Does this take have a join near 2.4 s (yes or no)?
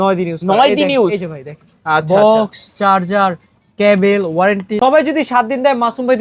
no